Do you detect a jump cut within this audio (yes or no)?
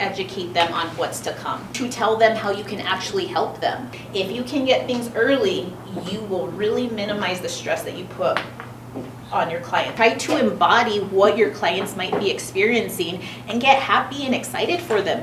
yes